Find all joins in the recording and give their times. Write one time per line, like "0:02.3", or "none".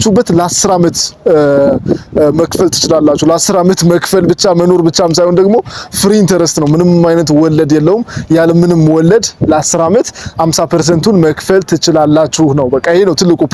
none